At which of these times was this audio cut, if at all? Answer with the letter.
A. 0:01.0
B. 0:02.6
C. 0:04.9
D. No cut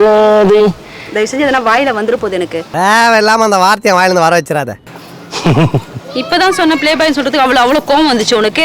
C